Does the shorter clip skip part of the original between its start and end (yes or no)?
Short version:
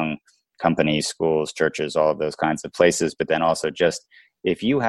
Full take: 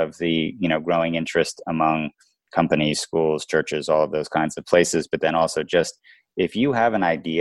no